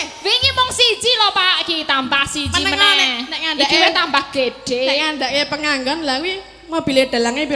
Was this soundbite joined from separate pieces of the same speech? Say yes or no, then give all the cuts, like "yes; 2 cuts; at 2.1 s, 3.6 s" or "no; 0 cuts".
no; 0 cuts